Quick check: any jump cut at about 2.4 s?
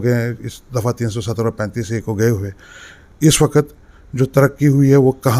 no; 0 cuts

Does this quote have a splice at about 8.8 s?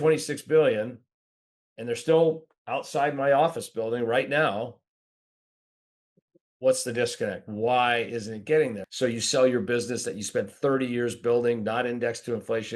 yes; 1 cut; at 8.8 s

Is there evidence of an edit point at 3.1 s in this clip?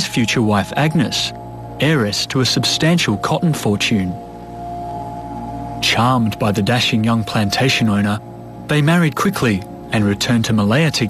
yes; 1 cut; at 3.1 s

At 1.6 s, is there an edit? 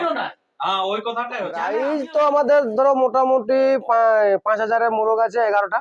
yes; 1 cut; at 1.6 s

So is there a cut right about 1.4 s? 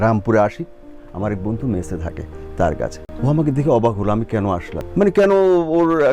no; 2 cuts; at 3.0 s, 4.8 s

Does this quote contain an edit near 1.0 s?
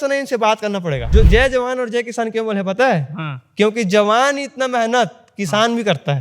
yes; 1 cut; at 1.0 s

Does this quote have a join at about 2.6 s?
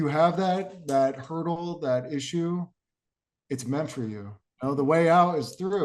no; 1 cut; at 4.4 s

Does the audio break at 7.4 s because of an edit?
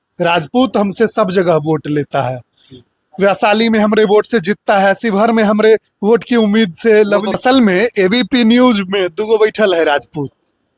yes; 1 cut; at 7.4 s

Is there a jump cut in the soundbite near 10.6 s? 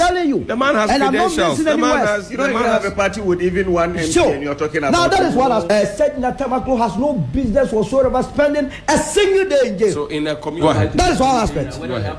yes; 2 cuts; at 5.7 s, 10.6 s

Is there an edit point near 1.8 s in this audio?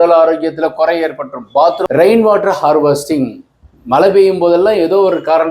yes; 1 cut; at 1.8 s

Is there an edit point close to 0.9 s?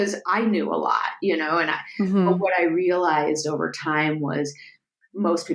no; 0 cuts

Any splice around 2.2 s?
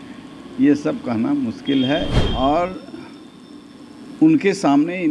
yes; 1 cut; at 2.2 s

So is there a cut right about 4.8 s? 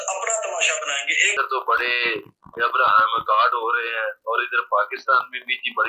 no; 1 cut; at 1.3 s

